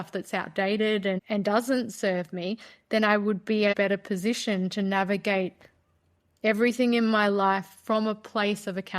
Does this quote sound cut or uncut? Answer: cut